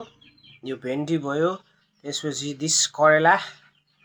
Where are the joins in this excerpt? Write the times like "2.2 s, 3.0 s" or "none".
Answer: none